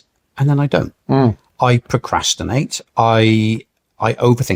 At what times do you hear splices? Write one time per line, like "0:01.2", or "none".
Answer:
none